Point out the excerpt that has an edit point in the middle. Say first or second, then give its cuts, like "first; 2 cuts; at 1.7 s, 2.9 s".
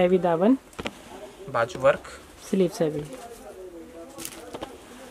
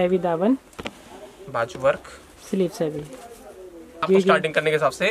second; 1 cut; at 4.0 s